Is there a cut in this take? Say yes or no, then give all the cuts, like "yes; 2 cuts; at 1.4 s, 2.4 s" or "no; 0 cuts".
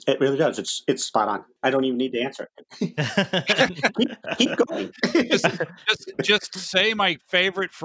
yes; 1 cut; at 1.5 s